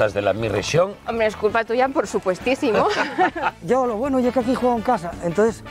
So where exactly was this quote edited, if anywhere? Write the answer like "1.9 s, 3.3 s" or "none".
0.9 s, 3.6 s